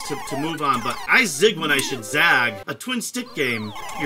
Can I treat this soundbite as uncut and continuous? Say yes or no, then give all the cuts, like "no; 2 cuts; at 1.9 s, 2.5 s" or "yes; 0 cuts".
no; 2 cuts; at 1.0 s, 2.7 s